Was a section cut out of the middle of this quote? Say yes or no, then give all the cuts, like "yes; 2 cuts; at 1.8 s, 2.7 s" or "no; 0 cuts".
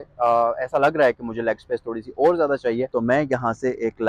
yes; 1 cut; at 2.9 s